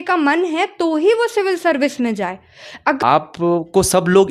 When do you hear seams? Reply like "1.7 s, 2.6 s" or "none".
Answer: 3.0 s